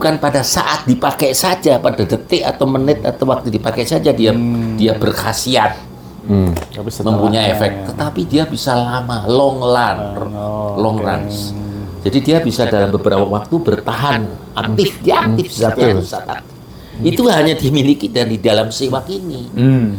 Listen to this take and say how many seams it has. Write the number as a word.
zero